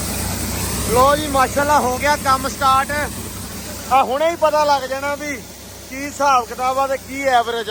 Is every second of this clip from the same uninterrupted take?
yes; 0 cuts

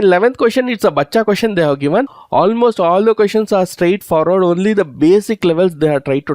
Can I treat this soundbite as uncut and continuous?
no; 1 cut; at 2.2 s

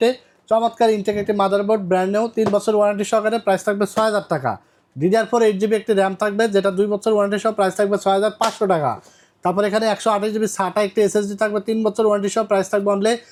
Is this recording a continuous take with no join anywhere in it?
yes; 0 cuts

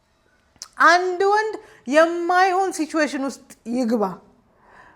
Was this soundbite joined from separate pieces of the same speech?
no; 0 cuts

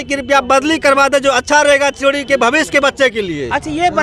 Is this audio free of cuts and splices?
yes; 0 cuts

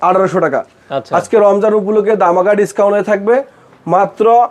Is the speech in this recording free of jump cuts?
yes; 0 cuts

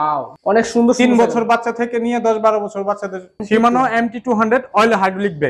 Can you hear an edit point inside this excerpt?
yes; 1 cut; at 3.4 s

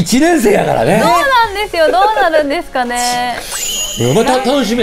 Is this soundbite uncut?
yes; 0 cuts

